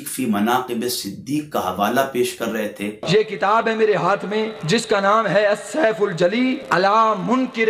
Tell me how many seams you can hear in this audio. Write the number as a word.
three